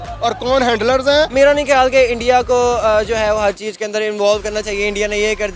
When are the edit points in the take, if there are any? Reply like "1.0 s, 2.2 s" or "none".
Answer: 1.3 s

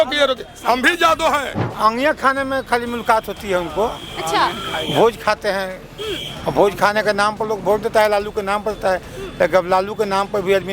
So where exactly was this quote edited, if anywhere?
1.6 s

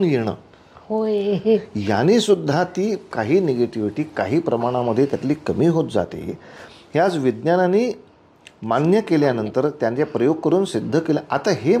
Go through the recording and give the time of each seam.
none

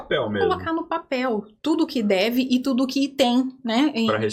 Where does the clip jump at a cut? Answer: none

